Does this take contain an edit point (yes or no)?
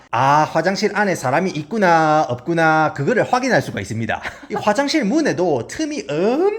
yes